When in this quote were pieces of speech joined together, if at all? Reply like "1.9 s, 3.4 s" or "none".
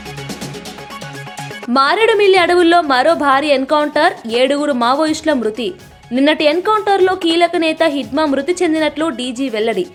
none

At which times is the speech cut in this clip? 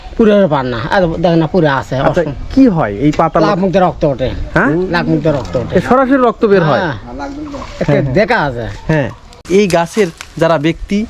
9.3 s

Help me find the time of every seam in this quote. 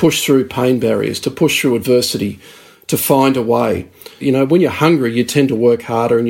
4.2 s

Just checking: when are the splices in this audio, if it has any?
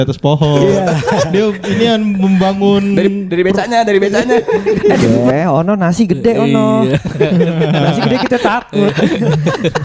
5.1 s

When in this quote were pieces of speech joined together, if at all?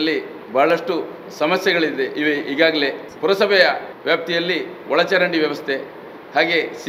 3.0 s, 3.9 s

